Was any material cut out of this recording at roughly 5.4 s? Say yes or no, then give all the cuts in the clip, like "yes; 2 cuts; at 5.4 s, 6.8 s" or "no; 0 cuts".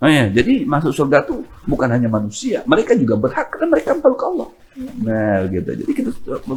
no; 0 cuts